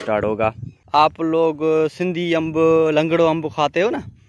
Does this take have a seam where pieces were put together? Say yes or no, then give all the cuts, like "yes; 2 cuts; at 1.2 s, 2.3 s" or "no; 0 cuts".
yes; 1 cut; at 1.0 s